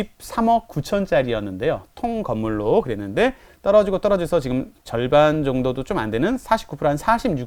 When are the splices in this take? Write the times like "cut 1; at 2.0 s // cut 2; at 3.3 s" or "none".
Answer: none